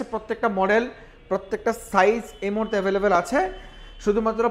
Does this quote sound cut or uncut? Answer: uncut